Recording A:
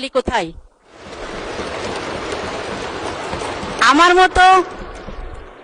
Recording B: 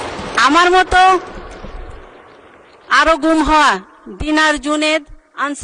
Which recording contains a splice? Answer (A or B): A